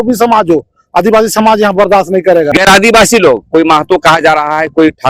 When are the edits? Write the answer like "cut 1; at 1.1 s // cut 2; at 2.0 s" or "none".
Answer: cut 1; at 2.5 s